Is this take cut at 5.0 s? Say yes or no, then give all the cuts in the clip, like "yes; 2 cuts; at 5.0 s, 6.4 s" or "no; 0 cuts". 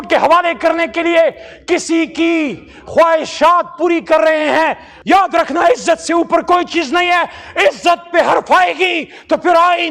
yes; 1 cut; at 5.0 s